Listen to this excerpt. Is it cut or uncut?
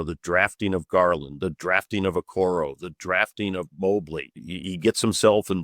cut